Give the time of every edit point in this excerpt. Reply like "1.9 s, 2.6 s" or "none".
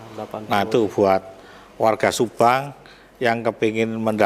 none